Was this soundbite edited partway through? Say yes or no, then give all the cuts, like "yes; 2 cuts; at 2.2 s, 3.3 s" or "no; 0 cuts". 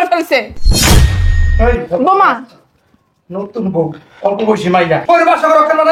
yes; 1 cut; at 5.0 s